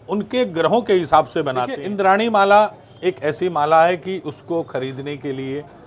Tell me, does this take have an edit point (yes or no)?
yes